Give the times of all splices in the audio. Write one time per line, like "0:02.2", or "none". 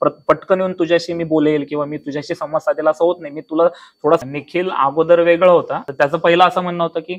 0:04.3
0:05.8